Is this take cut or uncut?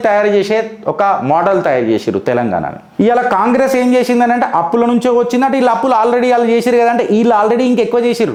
uncut